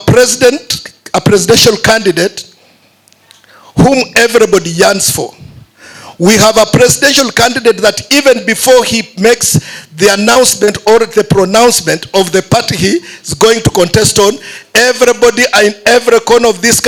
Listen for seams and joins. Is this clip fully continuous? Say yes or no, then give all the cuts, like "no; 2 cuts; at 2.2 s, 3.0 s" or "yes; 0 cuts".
yes; 0 cuts